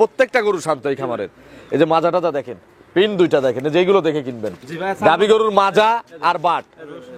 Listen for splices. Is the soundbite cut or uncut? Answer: uncut